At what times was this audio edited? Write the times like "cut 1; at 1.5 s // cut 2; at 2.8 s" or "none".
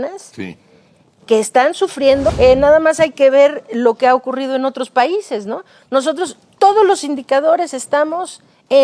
cut 1; at 2.3 s